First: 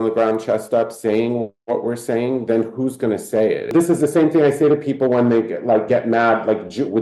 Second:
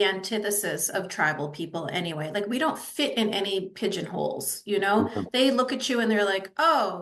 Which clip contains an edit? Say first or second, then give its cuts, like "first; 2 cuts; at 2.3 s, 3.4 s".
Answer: first; 1 cut; at 3.7 s